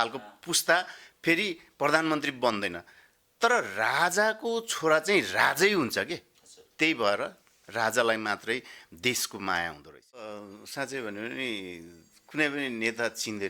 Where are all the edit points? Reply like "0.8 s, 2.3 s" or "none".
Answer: 10.5 s